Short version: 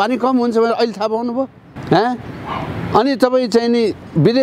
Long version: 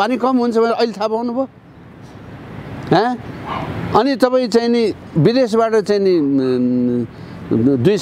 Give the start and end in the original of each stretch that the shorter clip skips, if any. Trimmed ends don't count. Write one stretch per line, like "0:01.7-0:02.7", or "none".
0:01.7-0:02.7